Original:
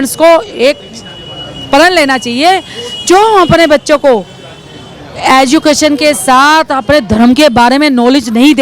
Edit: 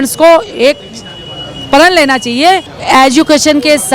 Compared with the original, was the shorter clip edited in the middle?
yes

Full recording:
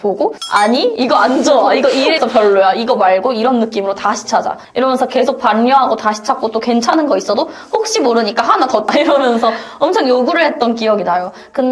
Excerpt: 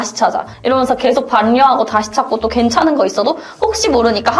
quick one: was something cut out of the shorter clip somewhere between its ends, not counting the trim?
no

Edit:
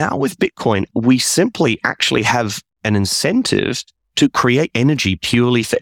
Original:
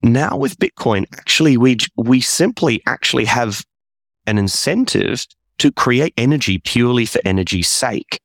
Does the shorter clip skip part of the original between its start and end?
yes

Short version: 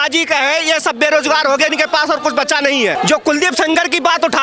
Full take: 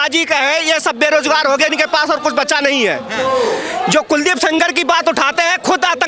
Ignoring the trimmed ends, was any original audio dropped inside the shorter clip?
yes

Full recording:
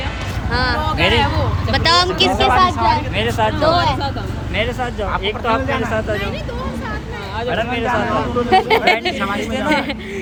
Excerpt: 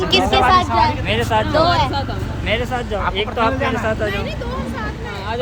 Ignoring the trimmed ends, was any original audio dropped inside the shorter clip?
no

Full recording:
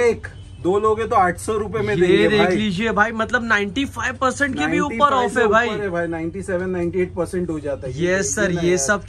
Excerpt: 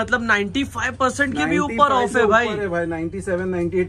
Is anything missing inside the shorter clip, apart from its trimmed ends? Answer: no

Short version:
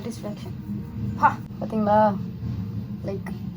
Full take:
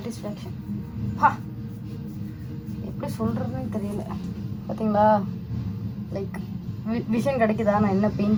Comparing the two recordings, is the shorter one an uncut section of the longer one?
no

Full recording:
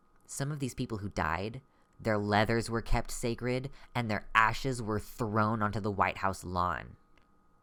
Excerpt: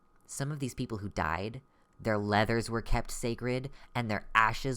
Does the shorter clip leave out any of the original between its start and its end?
no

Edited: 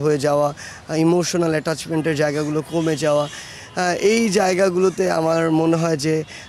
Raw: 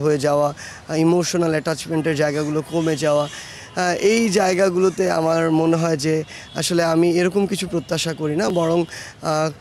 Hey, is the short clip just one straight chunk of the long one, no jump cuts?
yes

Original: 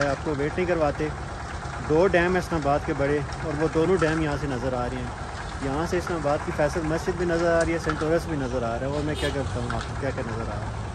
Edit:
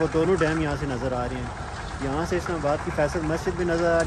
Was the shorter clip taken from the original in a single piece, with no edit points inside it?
yes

